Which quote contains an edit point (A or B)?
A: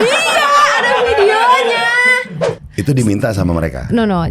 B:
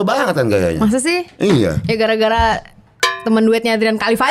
A